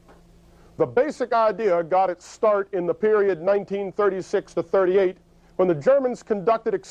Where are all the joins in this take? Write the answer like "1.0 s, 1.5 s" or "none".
1.3 s